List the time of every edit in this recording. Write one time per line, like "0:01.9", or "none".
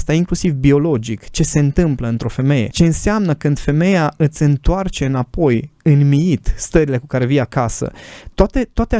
0:02.7